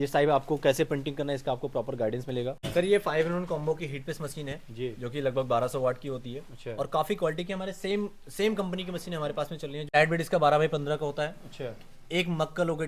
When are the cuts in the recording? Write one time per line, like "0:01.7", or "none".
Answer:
0:02.6
0:09.9